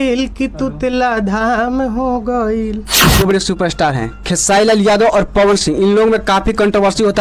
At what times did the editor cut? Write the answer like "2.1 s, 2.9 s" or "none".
3.2 s